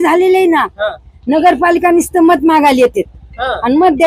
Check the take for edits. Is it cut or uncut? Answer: uncut